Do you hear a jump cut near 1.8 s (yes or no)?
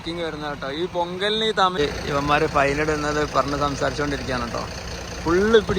yes